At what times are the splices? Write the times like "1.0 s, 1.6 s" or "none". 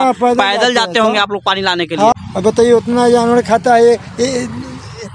2.1 s